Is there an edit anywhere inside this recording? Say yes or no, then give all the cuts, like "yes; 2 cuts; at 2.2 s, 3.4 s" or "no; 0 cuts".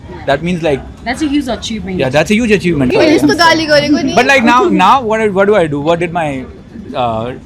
yes; 1 cut; at 2.9 s